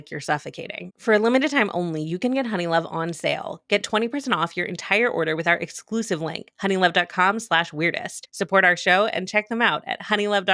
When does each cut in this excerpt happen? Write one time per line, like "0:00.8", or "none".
none